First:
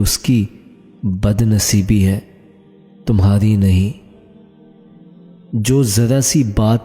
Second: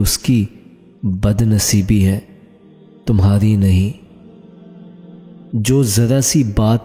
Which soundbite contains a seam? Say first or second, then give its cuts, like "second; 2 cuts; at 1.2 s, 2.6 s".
first; 2 cuts; at 4.1 s, 5.5 s